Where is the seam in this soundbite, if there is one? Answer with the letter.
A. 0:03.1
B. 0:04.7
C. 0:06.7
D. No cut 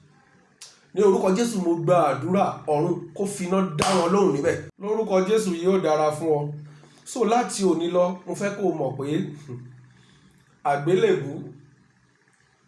B